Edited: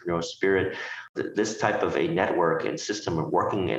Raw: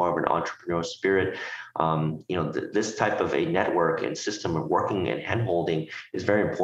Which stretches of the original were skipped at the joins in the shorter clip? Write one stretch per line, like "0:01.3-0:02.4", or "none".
0:01.7-0:02.5